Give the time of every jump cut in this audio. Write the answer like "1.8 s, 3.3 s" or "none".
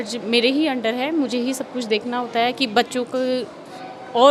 none